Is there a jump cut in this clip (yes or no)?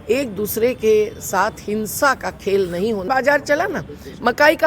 yes